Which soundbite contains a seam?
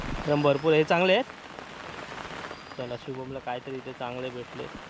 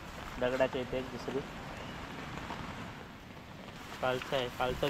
second; 1 cut; at 3.8 s

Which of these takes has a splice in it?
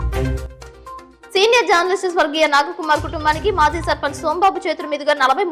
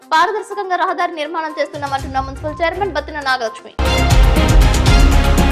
second; 1 cut; at 3.6 s

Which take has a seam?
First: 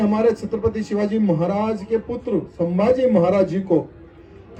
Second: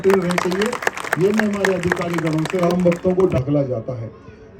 second; 1 cut; at 2.6 s

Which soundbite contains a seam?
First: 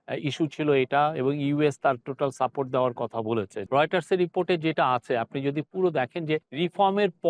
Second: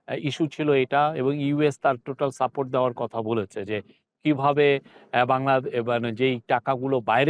first; 2 cuts; at 3.6 s, 6.5 s

